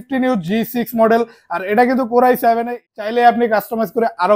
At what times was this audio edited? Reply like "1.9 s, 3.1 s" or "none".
2.8 s